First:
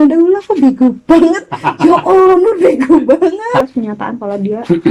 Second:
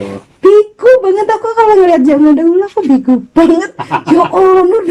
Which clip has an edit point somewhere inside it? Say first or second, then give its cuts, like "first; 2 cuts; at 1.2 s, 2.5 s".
first; 1 cut; at 3.6 s